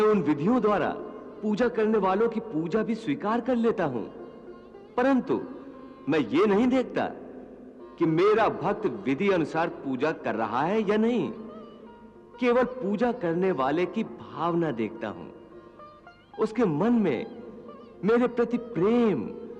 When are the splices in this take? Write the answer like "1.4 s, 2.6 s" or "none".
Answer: none